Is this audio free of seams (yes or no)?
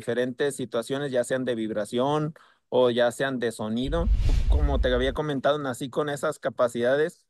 no